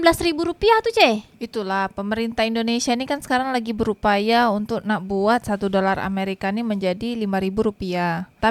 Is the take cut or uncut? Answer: uncut